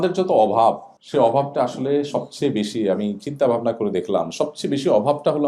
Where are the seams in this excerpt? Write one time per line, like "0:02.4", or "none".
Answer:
0:00.9

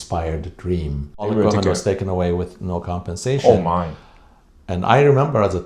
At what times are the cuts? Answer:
0:01.3

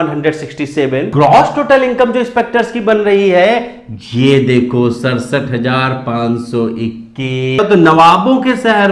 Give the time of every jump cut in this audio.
0:01.1
0:07.6

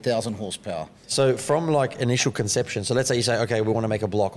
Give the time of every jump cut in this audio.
0:01.0

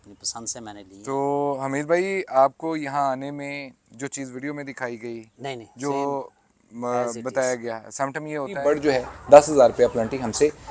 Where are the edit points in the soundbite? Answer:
0:08.7

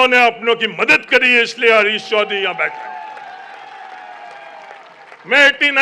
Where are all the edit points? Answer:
none

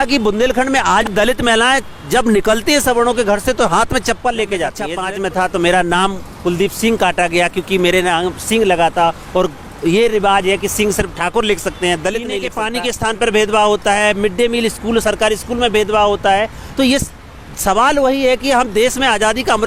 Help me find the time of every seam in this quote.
0:01.1
0:04.9
0:12.5

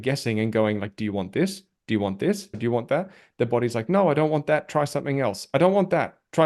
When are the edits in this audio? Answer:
0:02.6

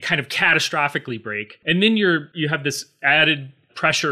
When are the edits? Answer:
0:01.6
0:02.3

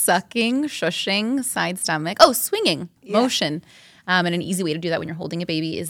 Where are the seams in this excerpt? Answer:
0:03.0

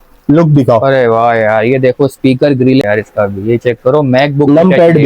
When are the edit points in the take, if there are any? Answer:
0:02.8

